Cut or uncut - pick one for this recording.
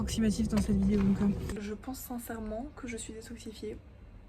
cut